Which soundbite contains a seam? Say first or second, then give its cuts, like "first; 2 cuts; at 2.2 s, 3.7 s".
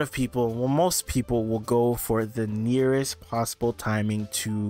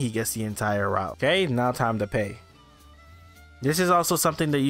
second; 1 cut; at 1.1 s